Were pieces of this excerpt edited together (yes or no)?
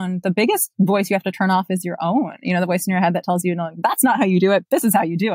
no